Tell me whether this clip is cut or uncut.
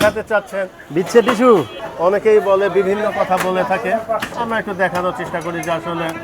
cut